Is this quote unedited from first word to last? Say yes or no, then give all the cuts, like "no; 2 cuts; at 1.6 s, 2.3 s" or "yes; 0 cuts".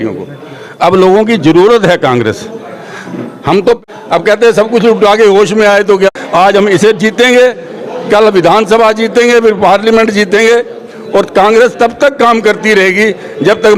no; 2 cuts; at 3.8 s, 6.1 s